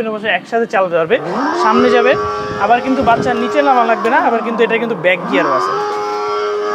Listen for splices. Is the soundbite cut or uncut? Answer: uncut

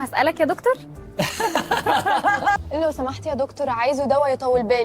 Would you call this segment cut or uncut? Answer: cut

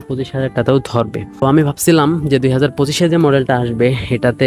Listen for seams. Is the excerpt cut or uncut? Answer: cut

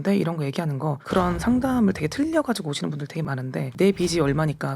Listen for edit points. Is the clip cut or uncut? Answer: cut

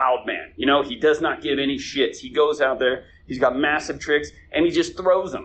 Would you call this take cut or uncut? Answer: uncut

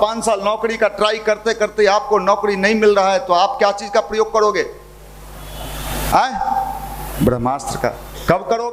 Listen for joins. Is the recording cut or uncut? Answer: uncut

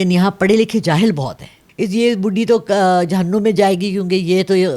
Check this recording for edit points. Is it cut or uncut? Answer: cut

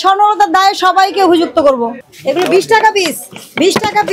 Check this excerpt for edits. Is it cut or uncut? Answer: cut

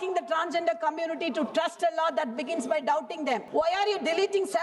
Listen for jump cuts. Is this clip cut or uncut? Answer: cut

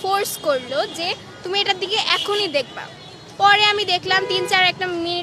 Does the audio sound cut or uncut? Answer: uncut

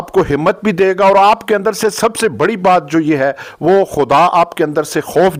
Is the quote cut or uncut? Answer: uncut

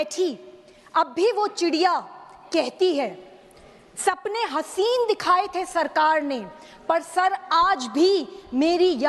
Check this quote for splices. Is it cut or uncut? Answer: uncut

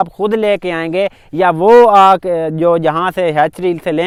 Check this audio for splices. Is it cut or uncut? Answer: uncut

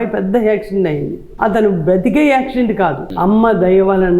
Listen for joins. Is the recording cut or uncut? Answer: cut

